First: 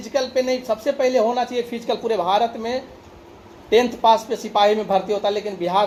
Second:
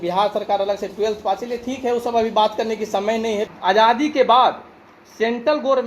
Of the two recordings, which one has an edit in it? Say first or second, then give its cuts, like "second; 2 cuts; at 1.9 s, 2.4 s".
second; 1 cut; at 3.5 s